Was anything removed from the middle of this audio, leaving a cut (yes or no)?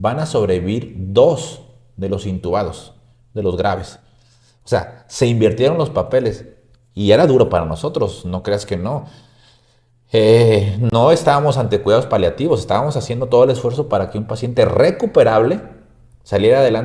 no